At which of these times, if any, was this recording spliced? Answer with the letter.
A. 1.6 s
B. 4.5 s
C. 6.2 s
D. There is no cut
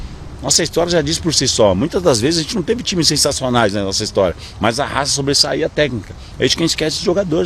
D